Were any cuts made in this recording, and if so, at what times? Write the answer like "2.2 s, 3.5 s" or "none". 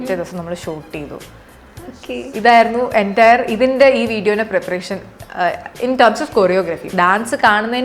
6.9 s

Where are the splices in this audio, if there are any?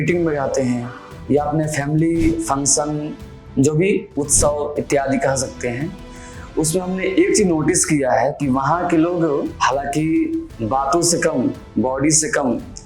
9.5 s

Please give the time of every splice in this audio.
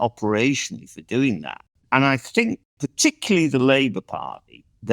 1.7 s, 2.7 s

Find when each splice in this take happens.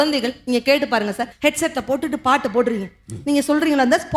1.3 s

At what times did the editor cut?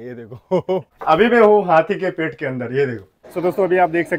0.9 s, 3.1 s

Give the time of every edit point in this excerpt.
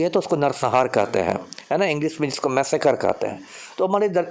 none

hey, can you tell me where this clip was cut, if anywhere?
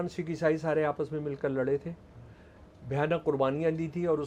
none

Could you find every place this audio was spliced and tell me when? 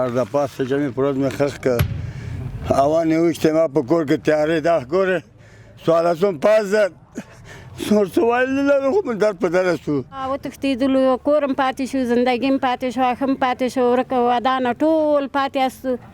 10.3 s

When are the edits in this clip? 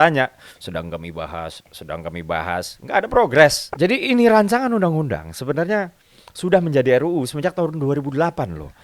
3.6 s

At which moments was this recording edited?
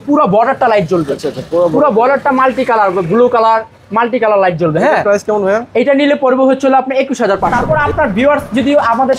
7.6 s

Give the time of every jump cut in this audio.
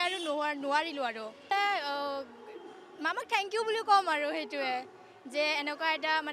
1.5 s

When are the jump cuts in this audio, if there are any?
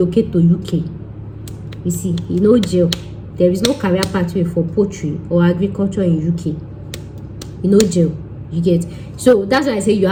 none

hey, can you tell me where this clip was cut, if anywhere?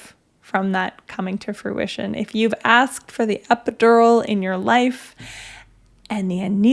none

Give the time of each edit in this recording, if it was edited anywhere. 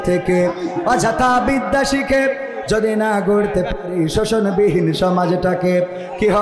none

